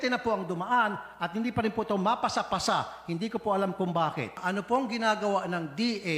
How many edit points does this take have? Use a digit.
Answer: 1